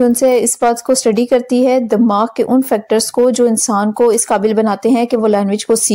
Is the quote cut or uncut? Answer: uncut